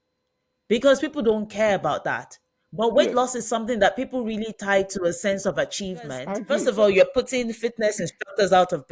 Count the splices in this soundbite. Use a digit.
1